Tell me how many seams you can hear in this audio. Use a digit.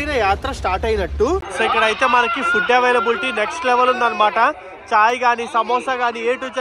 1